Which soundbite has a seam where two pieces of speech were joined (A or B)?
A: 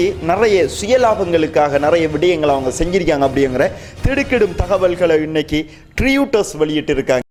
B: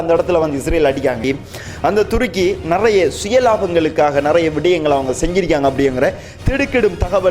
B